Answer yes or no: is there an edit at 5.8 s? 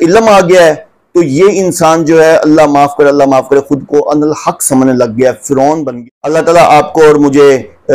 yes